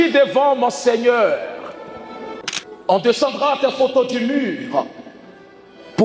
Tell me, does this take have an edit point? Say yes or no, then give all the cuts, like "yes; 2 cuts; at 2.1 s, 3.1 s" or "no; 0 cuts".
yes; 1 cut; at 2.4 s